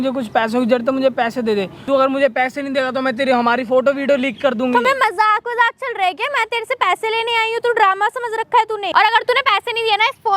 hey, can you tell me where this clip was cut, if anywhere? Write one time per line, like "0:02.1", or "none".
0:01.8
0:04.8
0:08.9